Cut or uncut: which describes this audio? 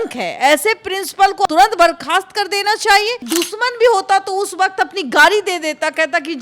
cut